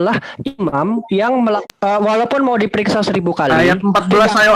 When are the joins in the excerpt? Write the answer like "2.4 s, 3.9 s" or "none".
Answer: 1.6 s